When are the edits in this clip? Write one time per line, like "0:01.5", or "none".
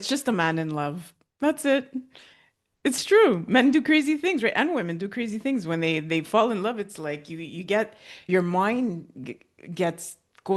none